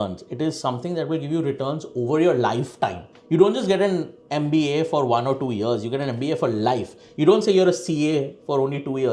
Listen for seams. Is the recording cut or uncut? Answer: uncut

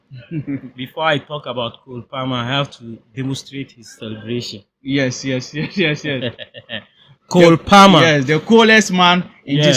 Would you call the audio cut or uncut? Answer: uncut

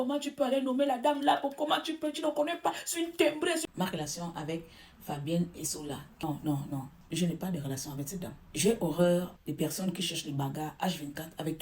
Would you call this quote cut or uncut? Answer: cut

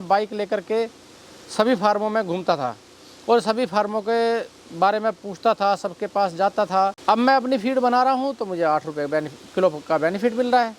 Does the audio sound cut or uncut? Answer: cut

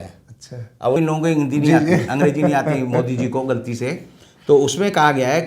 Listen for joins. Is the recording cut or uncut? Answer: cut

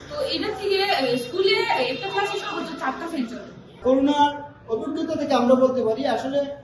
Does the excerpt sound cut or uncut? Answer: cut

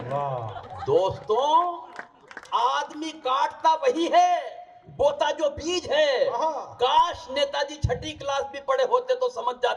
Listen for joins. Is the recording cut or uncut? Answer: uncut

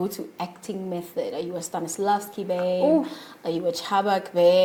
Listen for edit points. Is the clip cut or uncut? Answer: uncut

